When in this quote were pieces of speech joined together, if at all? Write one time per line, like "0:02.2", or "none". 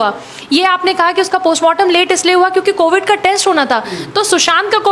none